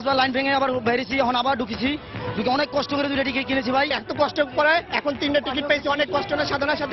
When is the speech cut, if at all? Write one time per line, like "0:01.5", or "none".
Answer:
0:04.0